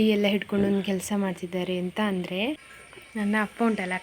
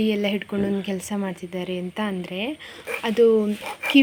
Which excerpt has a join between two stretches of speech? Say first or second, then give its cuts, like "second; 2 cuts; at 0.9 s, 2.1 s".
first; 1 cut; at 2.7 s